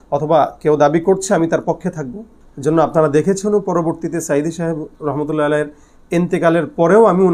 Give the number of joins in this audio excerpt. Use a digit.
0